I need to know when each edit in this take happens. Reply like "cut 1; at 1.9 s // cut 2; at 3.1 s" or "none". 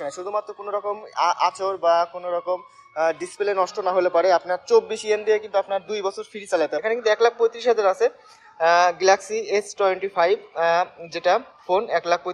cut 1; at 6.8 s